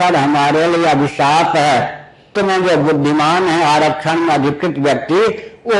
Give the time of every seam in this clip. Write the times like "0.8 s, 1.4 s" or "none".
2.3 s